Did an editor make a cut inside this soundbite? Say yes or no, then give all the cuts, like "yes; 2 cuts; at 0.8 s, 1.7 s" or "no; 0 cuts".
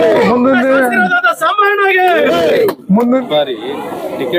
yes; 1 cut; at 3.2 s